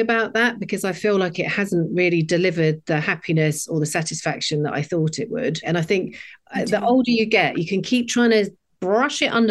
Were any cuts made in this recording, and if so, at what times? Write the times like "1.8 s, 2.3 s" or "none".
5.6 s